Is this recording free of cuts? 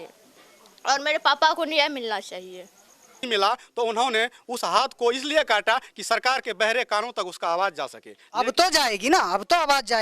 no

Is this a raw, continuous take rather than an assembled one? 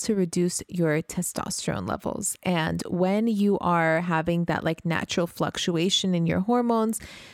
yes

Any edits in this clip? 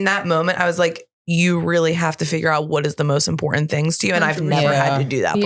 no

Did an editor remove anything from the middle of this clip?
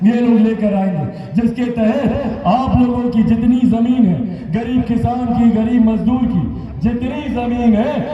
no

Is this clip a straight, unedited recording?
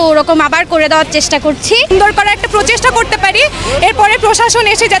no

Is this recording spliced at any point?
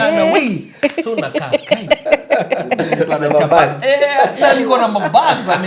no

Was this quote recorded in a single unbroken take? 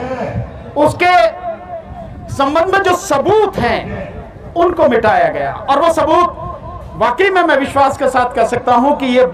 yes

